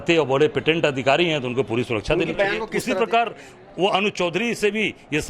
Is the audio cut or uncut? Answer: cut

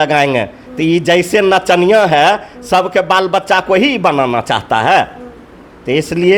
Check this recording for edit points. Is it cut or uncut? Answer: uncut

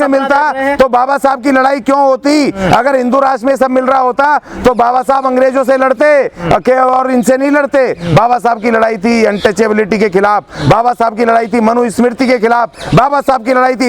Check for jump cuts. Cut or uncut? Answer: uncut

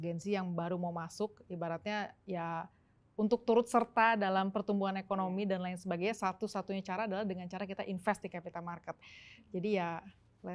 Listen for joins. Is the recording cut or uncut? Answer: uncut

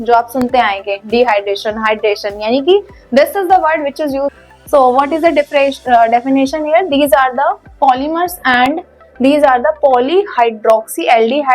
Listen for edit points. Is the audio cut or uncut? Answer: cut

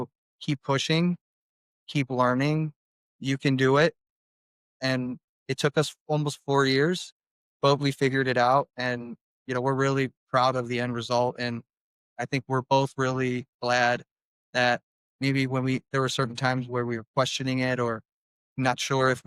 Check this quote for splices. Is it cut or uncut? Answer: uncut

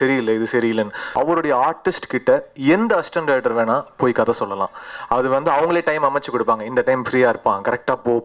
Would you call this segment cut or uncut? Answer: cut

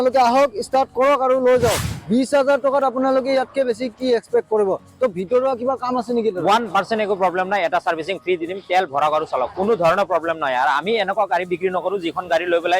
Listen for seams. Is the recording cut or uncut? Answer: cut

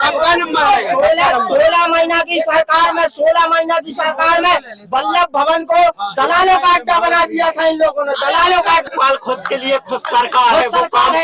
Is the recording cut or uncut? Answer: cut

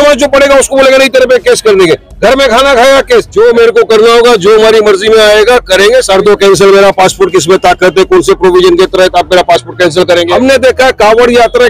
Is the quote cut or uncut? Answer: cut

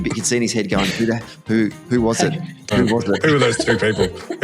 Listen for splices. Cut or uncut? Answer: cut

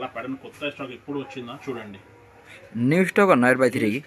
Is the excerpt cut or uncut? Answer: uncut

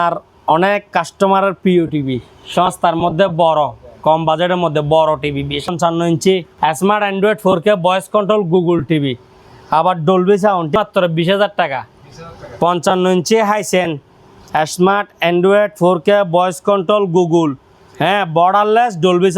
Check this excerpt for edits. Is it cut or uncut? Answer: cut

